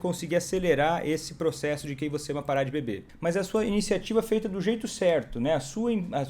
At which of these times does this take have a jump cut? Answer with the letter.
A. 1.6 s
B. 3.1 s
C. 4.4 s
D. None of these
B